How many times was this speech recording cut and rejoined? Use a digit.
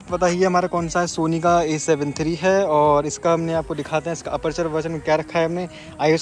0